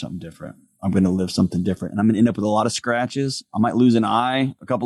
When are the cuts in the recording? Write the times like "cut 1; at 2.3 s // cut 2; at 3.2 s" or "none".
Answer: none